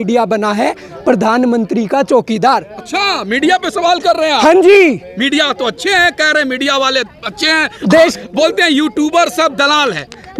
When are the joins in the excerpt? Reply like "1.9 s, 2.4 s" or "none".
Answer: none